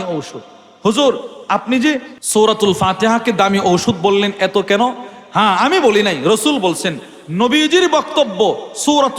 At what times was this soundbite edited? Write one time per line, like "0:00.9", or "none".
0:02.1